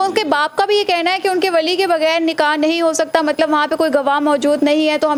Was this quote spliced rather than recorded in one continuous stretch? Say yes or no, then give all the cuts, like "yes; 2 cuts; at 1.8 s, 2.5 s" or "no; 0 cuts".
no; 0 cuts